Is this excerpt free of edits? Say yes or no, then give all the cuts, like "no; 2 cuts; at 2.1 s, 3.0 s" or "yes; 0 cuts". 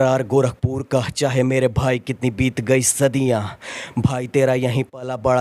yes; 0 cuts